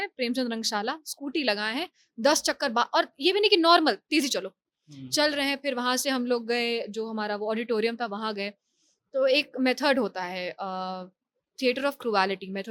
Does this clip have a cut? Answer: no; 0 cuts

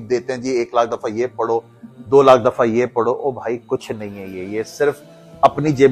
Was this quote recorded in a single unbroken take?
yes; 0 cuts

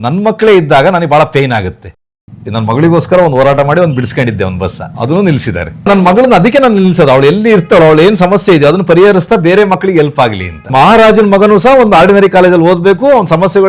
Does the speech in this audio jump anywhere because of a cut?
yes; 3 cuts; at 1.9 s, 5.9 s, 10.7 s

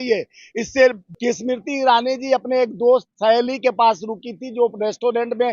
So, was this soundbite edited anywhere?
yes; 1 cut; at 1.0 s

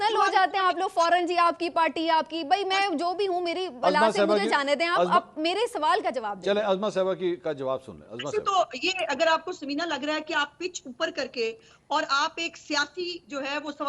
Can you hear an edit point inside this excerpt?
no; 0 cuts

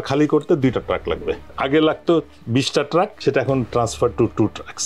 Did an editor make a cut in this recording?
yes; 1 cut; at 1.5 s

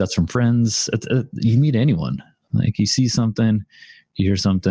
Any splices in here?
no; 0 cuts

